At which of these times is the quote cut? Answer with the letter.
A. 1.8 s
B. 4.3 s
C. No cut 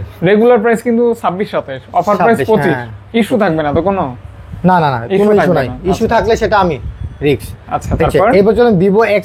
C